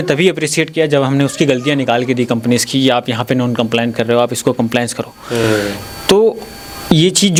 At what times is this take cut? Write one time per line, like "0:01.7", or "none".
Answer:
none